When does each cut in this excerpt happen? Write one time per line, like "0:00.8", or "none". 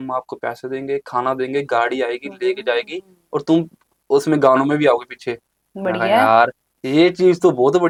none